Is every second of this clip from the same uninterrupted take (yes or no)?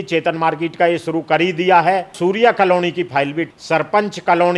no